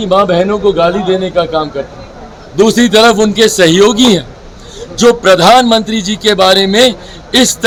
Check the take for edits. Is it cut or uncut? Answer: uncut